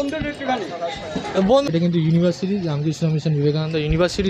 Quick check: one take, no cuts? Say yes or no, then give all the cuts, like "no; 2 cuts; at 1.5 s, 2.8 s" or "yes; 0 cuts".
no; 1 cut; at 1.7 s